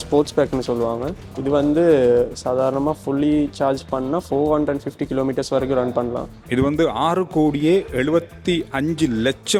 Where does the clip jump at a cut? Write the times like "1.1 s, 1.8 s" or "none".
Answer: none